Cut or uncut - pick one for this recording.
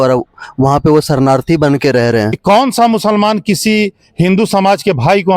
cut